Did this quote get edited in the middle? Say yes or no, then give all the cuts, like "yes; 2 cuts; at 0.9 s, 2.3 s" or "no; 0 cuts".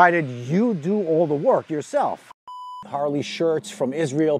yes; 1 cut; at 2.8 s